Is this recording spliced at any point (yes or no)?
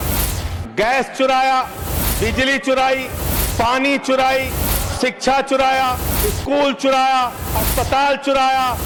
no